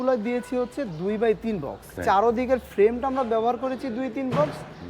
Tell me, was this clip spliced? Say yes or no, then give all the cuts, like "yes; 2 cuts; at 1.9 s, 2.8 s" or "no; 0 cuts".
yes; 1 cut; at 2.0 s